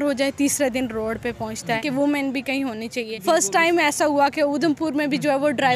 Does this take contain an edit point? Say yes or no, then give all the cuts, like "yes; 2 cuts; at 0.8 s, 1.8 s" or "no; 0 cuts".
yes; 2 cuts; at 1.8 s, 3.1 s